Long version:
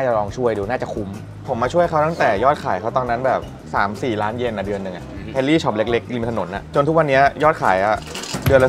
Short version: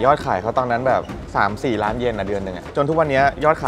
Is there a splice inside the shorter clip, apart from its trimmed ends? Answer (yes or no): yes